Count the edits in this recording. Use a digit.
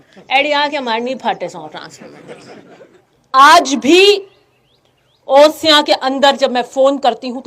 1